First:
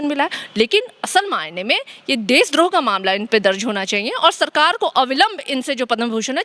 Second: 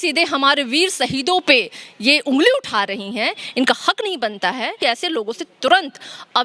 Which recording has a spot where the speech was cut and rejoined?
second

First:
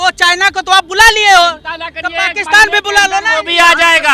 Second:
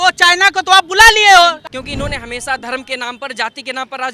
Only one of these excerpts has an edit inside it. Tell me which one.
second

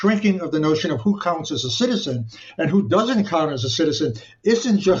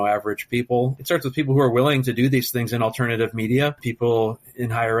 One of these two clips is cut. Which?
second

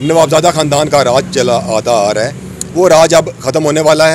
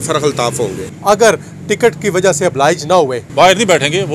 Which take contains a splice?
second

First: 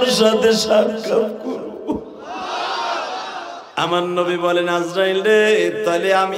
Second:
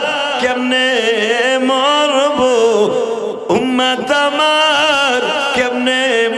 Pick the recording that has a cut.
first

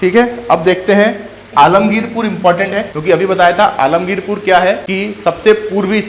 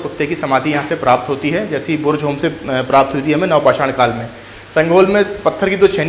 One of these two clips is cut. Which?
first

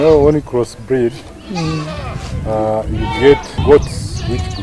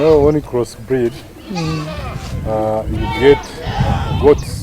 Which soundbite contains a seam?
first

